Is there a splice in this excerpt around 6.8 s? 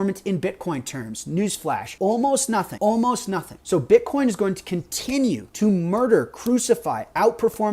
no; 4 cuts; at 1.9 s, 2.7 s, 3.5 s, 5.5 s

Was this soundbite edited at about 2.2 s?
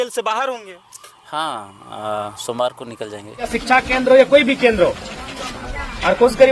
no; 1 cut; at 3.5 s

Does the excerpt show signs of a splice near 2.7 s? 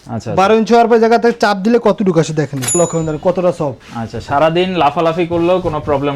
yes; 1 cut; at 2.7 s

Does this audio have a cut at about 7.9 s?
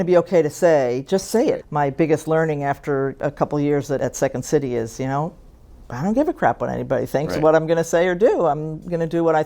no; 3 cuts; at 1.6 s, 3.1 s, 4.0 s

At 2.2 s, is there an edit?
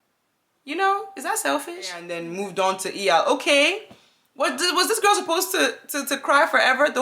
yes; 1 cut; at 2.2 s

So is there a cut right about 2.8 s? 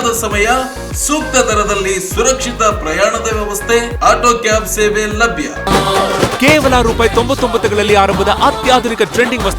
no; 1 cut; at 5.7 s

